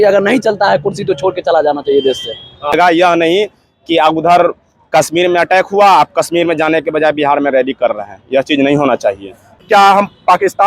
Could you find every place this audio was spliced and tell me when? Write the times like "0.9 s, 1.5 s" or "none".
2.7 s, 9.6 s

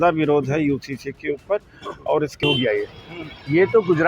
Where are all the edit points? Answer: 2.4 s

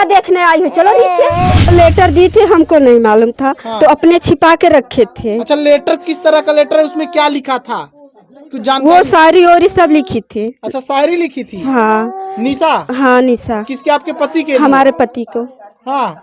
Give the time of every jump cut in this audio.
1.6 s

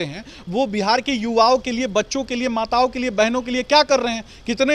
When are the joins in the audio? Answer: none

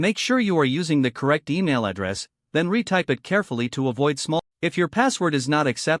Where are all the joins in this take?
4.4 s

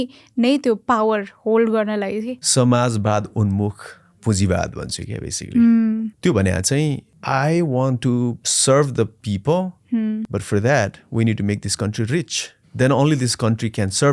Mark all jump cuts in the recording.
2.4 s, 6.1 s, 7.1 s, 8.5 s, 12.6 s

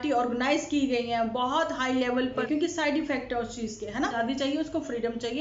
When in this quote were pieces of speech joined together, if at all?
2.4 s, 4.1 s

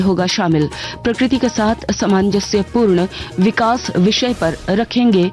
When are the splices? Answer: none

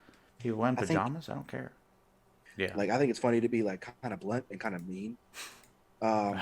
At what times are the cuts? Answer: 2.3 s

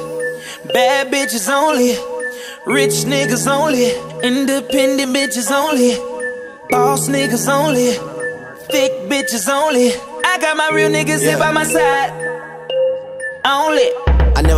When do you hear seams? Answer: none

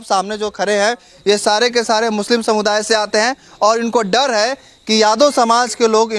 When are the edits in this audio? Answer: none

